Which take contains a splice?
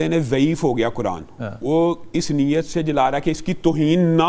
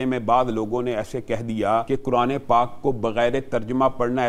second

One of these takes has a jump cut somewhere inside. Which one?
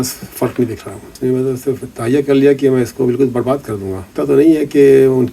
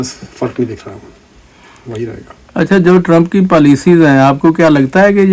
first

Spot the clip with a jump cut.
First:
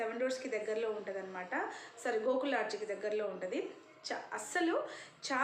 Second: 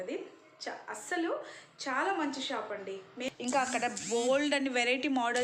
second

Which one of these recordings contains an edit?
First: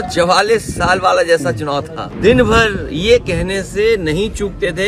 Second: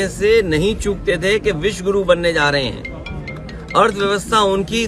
first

